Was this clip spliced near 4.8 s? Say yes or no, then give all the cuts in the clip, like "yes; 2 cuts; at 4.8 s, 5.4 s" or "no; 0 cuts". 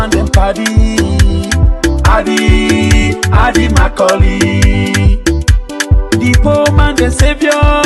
no; 0 cuts